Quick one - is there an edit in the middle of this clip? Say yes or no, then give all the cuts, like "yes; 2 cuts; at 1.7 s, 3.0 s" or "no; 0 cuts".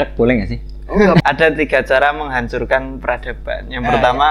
yes; 1 cut; at 1.2 s